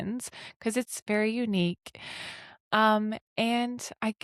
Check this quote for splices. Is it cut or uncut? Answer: uncut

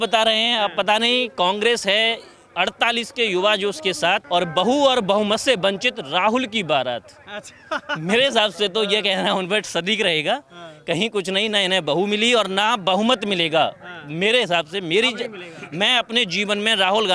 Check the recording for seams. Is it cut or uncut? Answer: uncut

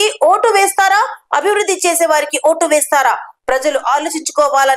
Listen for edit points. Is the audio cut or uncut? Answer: uncut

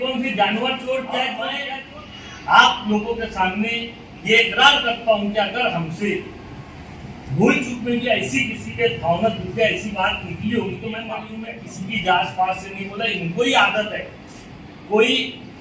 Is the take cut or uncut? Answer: cut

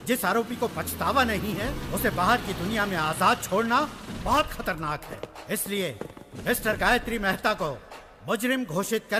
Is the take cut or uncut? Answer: uncut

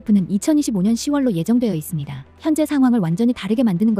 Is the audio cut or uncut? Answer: cut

